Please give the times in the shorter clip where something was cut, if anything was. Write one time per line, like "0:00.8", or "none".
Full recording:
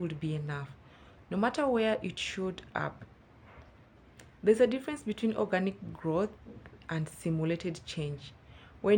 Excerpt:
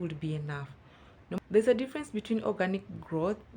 0:01.4